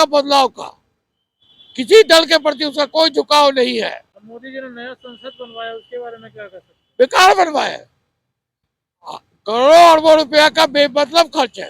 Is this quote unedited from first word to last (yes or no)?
yes